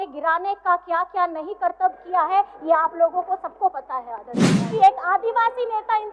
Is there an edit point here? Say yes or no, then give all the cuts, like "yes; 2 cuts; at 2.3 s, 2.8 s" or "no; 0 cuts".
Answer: yes; 1 cut; at 4.7 s